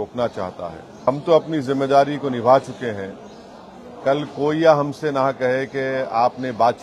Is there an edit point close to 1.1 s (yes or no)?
yes